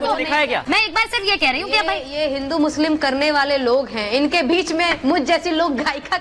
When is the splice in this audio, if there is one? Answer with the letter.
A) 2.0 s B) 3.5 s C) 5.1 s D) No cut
D